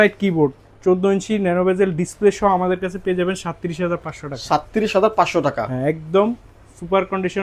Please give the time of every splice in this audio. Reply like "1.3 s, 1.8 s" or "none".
none